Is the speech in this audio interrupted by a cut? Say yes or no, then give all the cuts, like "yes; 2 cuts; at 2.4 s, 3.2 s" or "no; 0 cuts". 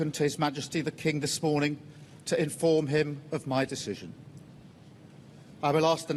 no; 0 cuts